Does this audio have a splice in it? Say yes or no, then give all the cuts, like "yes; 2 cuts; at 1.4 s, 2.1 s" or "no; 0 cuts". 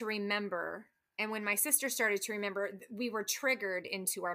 no; 0 cuts